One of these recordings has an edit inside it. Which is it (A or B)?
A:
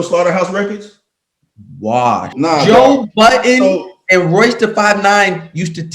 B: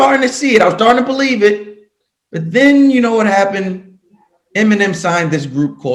A